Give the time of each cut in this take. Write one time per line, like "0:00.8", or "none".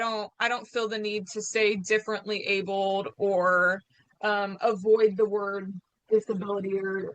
none

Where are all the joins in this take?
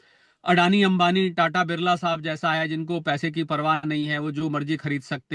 none

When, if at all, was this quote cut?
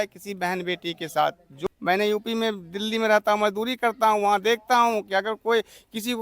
0:01.6

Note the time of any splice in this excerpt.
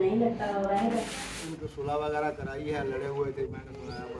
0:01.5

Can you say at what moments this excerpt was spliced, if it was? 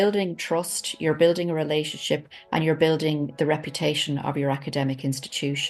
none

